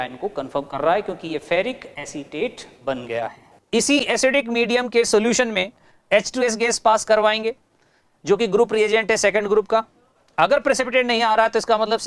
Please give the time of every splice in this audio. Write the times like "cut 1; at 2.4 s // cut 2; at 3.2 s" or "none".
cut 1; at 3.6 s